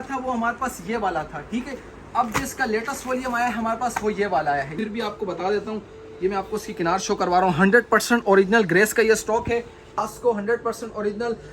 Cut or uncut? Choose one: cut